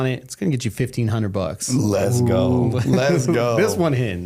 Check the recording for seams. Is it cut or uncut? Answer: uncut